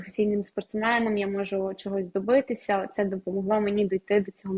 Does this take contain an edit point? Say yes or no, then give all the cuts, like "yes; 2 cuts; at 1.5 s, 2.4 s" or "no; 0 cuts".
no; 0 cuts